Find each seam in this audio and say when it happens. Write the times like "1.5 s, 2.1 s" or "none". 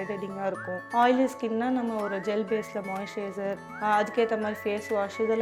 0.8 s, 3.7 s